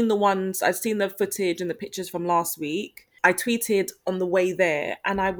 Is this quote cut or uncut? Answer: cut